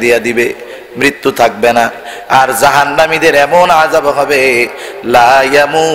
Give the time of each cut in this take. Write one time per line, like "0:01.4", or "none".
none